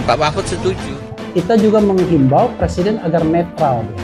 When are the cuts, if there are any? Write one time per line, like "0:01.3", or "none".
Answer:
none